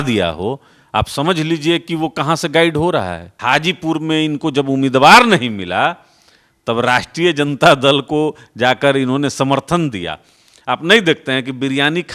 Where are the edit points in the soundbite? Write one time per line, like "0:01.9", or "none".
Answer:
0:03.3